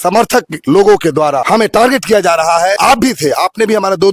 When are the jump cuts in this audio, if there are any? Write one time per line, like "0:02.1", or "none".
0:01.4
0:02.8